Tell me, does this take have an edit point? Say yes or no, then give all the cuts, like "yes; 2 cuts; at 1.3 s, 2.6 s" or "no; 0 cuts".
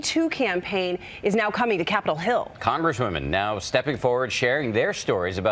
no; 0 cuts